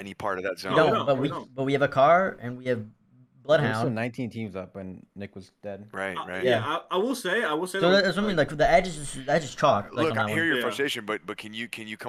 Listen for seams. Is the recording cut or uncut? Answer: uncut